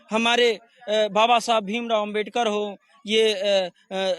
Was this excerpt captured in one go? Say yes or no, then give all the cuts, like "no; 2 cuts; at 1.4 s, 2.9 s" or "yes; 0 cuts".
yes; 0 cuts